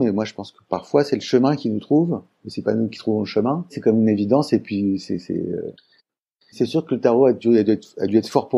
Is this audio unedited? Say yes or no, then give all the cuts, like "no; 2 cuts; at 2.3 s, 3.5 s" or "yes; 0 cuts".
no; 1 cut; at 6.3 s